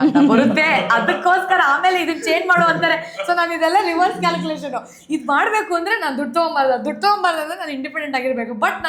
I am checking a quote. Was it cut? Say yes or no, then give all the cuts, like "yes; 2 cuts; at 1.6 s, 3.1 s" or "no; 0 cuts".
no; 0 cuts